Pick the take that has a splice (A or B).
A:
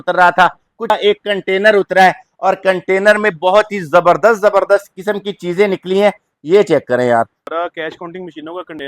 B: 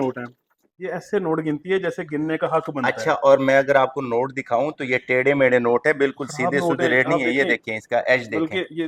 A